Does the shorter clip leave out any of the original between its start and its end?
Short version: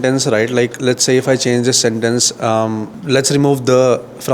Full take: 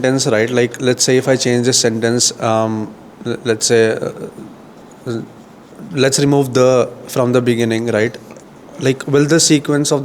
yes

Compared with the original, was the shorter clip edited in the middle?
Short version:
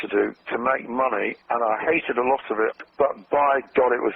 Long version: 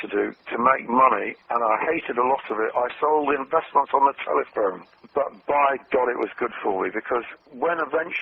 yes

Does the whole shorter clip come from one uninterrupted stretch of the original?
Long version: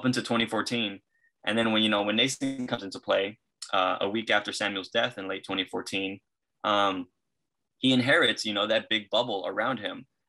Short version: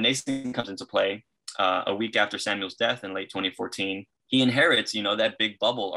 no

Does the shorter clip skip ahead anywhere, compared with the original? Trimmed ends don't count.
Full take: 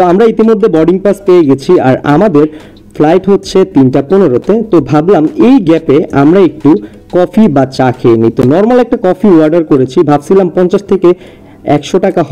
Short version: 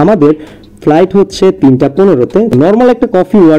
yes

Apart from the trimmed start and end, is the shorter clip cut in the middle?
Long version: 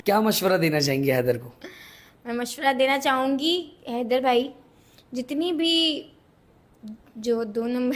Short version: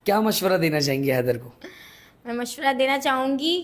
no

